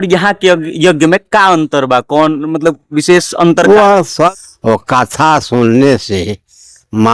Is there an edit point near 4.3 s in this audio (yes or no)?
yes